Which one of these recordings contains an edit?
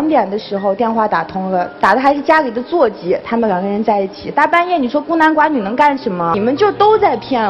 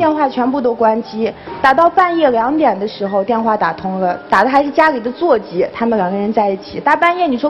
first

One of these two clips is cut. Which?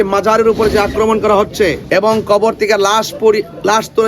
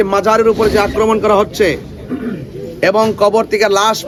first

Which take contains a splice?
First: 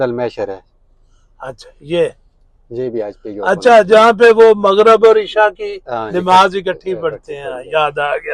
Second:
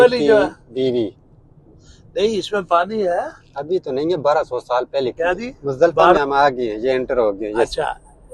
second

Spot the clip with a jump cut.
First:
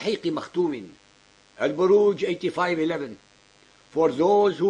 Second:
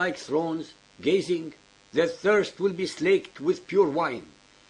first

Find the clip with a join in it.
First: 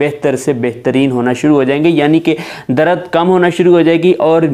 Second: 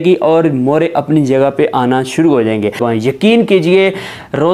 second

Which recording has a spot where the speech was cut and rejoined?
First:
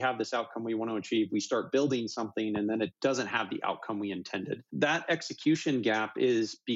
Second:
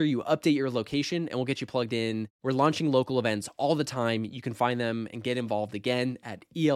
first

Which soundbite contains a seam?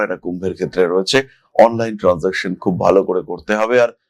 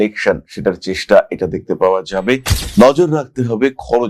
second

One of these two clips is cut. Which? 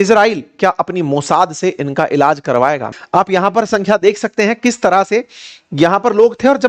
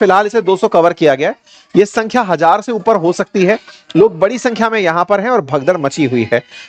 first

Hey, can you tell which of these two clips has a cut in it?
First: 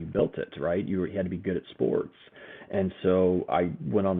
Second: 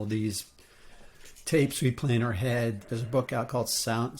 second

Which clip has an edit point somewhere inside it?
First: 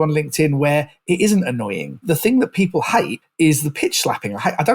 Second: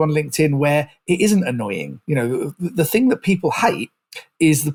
first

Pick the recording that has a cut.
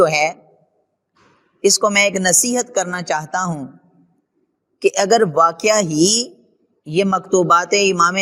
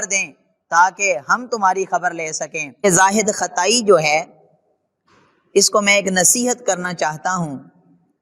second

